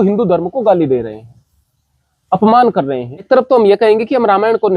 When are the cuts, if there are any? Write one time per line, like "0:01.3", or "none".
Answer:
0:03.3